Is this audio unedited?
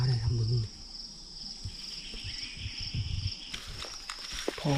no; 1 cut; at 3.5 s

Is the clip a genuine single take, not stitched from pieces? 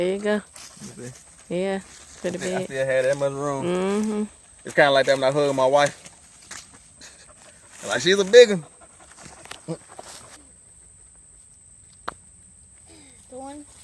no; 1 cut; at 10.4 s

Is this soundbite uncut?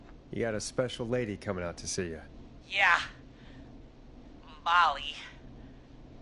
yes; 0 cuts

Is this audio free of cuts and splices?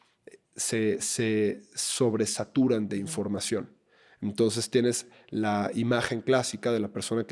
yes; 0 cuts

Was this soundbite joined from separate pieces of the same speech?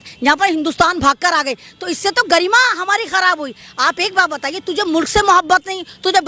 no; 0 cuts

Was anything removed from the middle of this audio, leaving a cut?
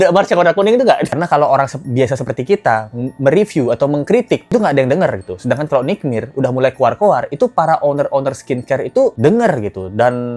yes; 2 cuts; at 1.1 s, 4.4 s

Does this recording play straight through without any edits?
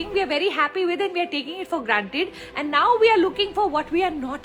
yes; 0 cuts

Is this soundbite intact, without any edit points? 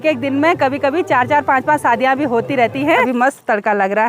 no; 1 cut; at 3.1 s

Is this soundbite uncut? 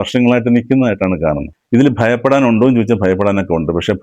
no; 1 cut; at 1.5 s

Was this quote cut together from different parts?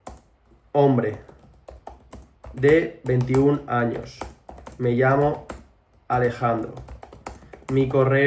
no; 0 cuts

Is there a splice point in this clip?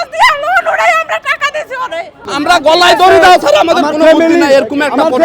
yes; 1 cut; at 2.3 s

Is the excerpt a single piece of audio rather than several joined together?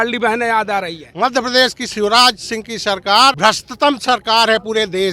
no; 2 cuts; at 1.0 s, 3.4 s

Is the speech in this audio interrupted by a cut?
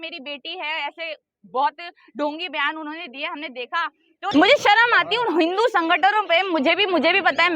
yes; 1 cut; at 4.3 s

